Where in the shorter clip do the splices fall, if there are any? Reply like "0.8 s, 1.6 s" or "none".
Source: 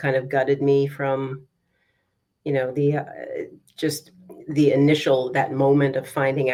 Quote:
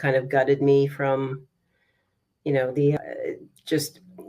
3.0 s